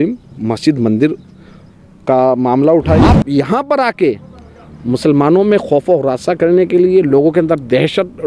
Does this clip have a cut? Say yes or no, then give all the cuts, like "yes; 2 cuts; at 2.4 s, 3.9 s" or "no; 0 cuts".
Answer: yes; 1 cut; at 3.0 s